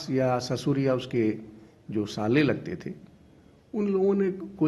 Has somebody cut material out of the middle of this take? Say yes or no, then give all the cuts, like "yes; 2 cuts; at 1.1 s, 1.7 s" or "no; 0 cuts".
no; 0 cuts